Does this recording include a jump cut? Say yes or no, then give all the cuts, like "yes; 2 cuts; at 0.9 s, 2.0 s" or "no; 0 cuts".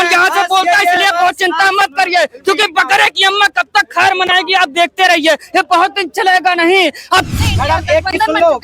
yes; 1 cut; at 7.3 s